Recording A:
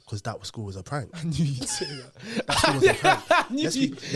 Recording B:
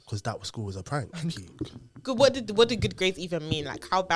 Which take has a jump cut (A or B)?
B